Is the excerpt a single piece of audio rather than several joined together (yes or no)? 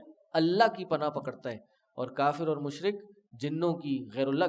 yes